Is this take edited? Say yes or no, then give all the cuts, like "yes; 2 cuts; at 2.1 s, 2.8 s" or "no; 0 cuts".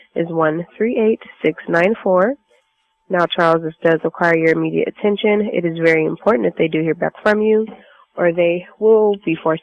no; 0 cuts